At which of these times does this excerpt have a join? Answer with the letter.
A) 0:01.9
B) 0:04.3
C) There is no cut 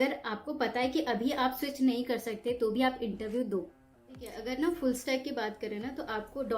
B